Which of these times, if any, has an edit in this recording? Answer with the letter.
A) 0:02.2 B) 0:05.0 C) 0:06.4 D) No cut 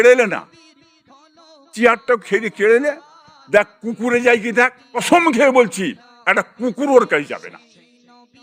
B